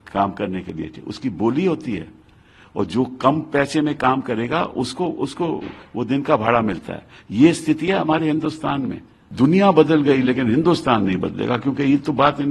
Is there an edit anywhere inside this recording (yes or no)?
yes